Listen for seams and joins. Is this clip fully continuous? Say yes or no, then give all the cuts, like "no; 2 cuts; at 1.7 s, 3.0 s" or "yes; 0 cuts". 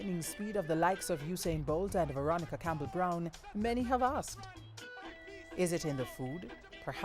yes; 0 cuts